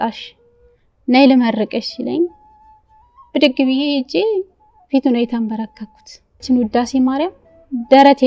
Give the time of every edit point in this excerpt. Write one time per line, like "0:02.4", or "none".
0:06.4